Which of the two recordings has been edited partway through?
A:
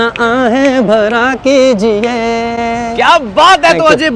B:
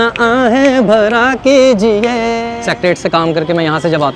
B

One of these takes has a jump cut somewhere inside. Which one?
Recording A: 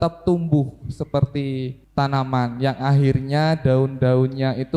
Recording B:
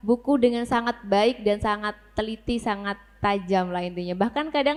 A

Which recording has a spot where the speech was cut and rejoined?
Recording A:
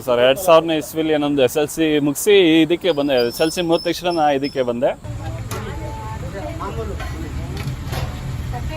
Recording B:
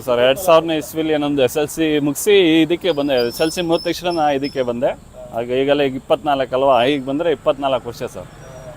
A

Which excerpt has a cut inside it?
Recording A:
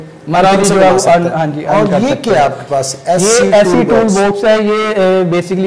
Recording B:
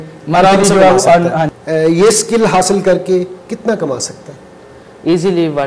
B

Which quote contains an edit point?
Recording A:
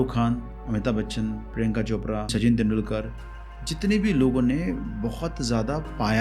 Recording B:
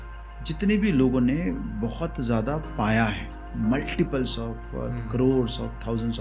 A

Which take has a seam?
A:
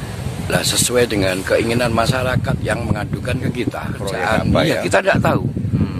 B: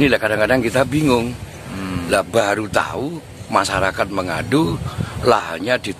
A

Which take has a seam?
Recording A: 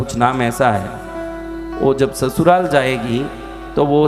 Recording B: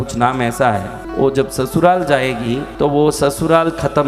B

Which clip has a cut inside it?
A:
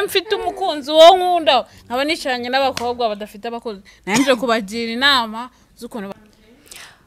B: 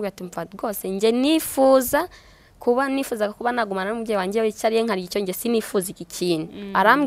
A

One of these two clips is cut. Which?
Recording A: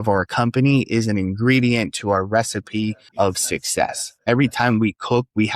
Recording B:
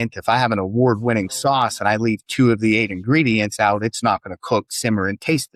A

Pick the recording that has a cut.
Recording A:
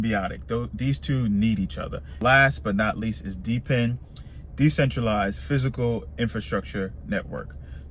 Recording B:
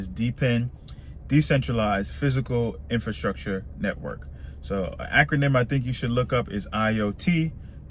A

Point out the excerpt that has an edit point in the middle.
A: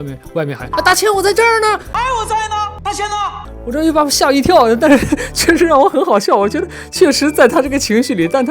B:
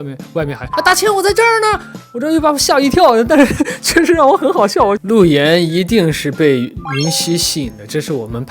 B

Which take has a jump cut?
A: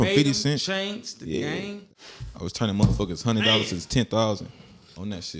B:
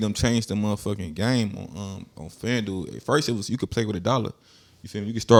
A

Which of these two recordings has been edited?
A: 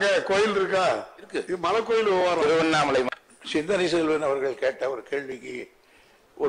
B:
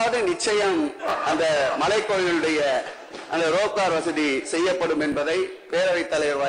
A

